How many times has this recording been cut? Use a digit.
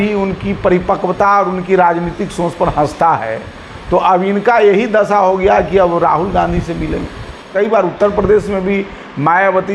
1